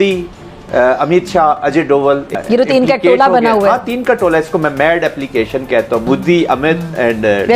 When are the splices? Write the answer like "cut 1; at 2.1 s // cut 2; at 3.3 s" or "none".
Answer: cut 1; at 2.4 s // cut 2; at 6.0 s